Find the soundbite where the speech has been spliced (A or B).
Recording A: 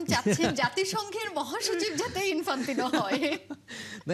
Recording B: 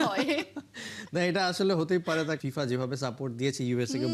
B